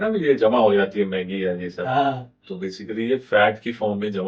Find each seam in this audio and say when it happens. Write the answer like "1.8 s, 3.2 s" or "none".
none